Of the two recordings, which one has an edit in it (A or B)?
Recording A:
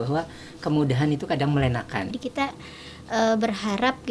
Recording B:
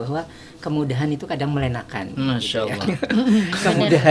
A